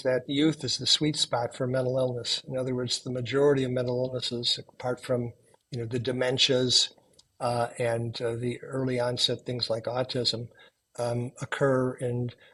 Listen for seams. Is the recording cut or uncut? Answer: uncut